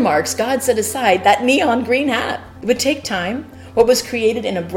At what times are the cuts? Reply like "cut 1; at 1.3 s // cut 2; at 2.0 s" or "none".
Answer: cut 1; at 2.4 s // cut 2; at 3.5 s